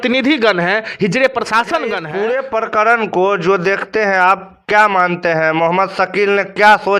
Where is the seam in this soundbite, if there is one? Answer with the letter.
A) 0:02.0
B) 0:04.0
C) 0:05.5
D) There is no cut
A